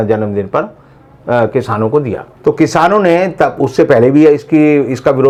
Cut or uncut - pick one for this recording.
uncut